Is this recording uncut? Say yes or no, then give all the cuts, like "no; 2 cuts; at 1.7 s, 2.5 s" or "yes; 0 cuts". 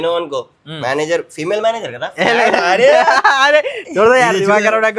yes; 0 cuts